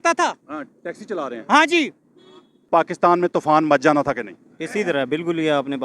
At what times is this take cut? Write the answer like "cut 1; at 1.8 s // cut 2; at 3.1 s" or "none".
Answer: cut 1; at 2.7 s